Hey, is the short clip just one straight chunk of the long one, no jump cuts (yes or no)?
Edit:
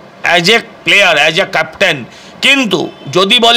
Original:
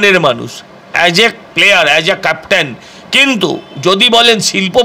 yes